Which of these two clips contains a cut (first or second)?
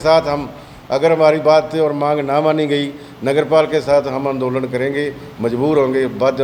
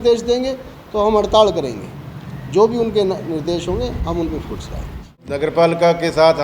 second